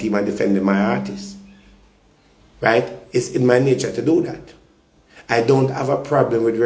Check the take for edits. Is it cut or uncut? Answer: uncut